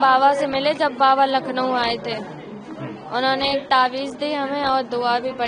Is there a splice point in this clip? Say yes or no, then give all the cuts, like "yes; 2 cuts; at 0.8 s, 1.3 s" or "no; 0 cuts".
no; 0 cuts